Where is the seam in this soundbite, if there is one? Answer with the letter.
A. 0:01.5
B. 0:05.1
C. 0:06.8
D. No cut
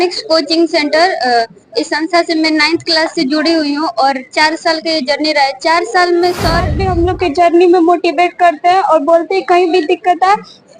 C